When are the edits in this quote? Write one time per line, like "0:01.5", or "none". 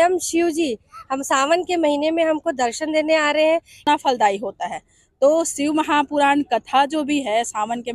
0:03.9